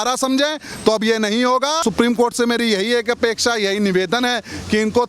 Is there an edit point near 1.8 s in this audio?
yes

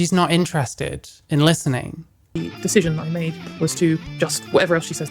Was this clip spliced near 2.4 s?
yes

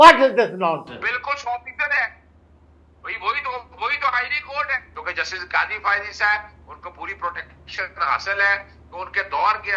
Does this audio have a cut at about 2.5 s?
no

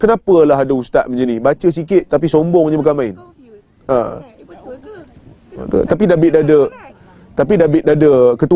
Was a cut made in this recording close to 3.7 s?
no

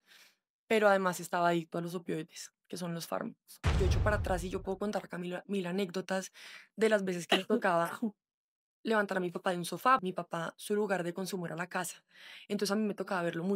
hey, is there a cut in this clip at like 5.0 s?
no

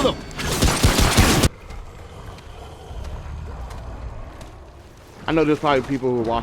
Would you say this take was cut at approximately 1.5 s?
yes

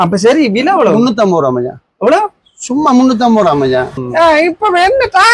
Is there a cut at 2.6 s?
no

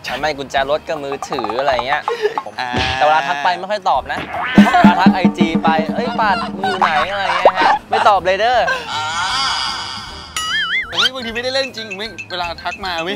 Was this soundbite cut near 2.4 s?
yes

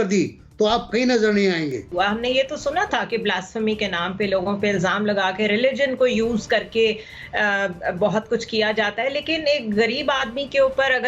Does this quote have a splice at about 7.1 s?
no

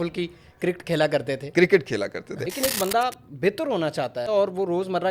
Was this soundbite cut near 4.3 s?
yes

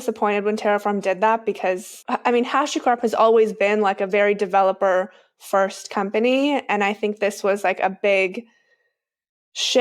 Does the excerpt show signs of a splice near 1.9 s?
yes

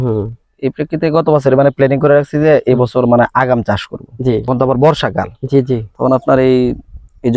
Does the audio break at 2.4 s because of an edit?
no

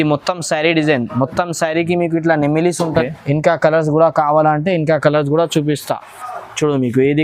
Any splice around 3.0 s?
yes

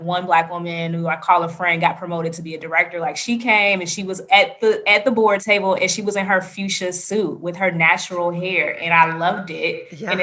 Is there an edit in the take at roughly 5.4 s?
yes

